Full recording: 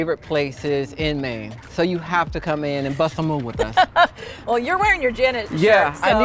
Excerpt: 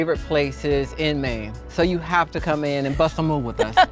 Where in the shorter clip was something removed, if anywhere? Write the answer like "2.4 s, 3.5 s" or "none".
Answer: none